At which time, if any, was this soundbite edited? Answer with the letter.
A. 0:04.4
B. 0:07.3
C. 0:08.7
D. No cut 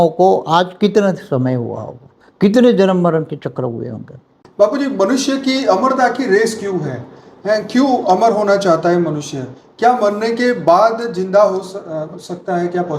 A